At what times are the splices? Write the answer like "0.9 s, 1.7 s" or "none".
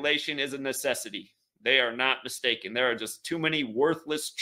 1.6 s